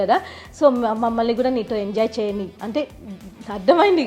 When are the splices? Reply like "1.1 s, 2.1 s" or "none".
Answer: none